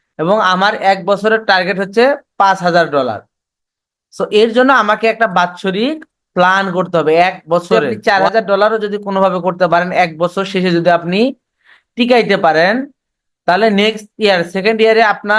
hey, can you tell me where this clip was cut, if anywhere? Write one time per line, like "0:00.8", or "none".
0:07.7